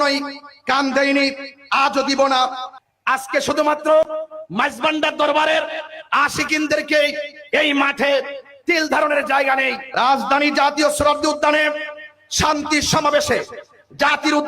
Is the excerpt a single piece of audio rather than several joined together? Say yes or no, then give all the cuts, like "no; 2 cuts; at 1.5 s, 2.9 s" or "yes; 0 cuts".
no; 2 cuts; at 2.8 s, 9.8 s